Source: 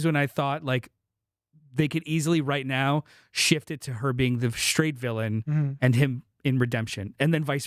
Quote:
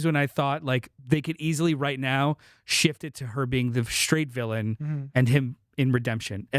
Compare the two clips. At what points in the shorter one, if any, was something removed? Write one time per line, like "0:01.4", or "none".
0:00.9